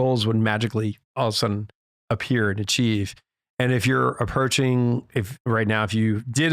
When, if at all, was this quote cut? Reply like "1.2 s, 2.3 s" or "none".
none